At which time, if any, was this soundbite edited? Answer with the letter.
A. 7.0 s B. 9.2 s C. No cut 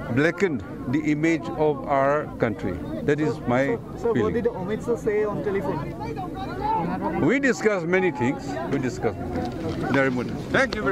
A